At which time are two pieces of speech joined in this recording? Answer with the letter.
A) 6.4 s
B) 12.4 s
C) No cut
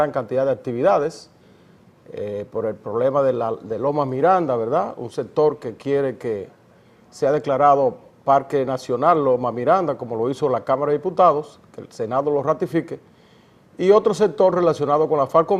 B